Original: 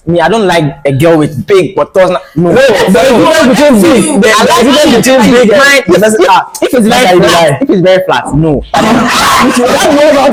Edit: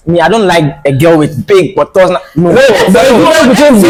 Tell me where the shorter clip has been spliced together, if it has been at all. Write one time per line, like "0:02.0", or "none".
none